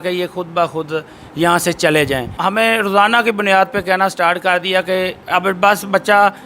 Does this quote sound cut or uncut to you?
cut